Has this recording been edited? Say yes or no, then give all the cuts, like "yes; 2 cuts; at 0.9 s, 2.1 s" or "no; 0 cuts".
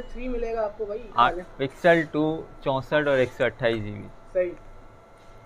yes; 1 cut; at 1.3 s